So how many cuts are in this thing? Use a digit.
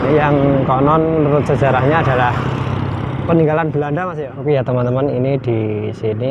1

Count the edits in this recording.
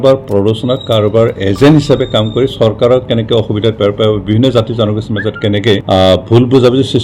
1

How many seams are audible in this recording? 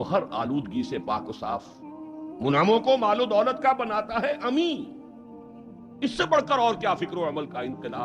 0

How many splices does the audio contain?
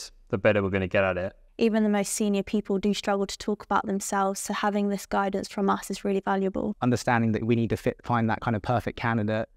2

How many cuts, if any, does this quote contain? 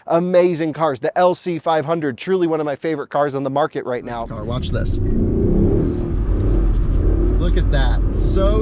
1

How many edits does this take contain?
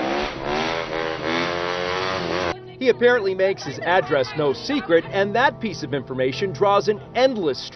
1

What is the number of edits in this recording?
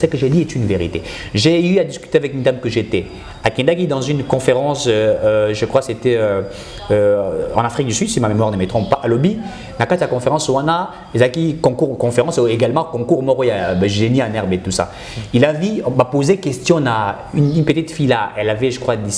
0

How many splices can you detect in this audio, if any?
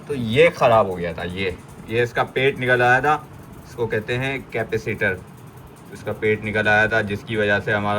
0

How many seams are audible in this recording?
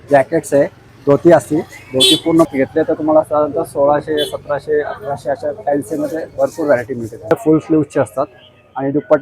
2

